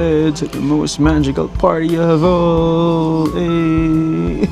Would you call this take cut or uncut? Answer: uncut